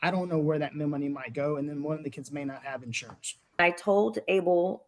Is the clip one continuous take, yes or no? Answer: no